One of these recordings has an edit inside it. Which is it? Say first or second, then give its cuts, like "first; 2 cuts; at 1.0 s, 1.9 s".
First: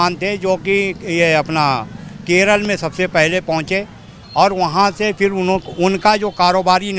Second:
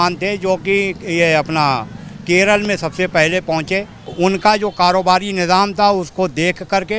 second; 1 cut; at 4.1 s